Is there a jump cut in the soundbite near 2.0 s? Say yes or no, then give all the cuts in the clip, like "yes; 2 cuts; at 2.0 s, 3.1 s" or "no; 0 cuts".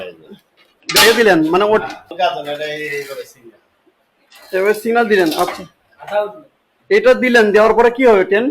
yes; 1 cut; at 2.0 s